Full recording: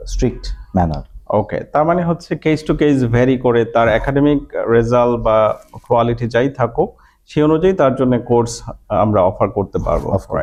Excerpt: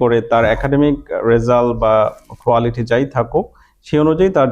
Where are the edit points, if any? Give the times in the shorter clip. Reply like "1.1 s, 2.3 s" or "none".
none